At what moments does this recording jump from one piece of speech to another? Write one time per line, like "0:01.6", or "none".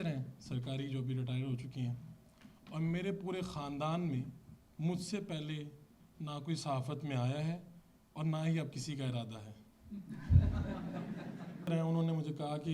0:11.7